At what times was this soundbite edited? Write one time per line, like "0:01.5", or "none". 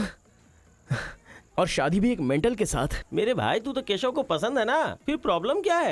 0:03.0